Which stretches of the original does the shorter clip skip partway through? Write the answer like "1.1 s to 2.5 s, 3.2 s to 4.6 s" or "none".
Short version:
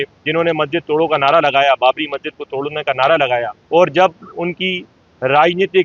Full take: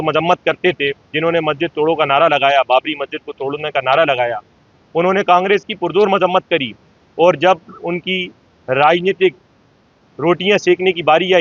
4.4 s to 7.0 s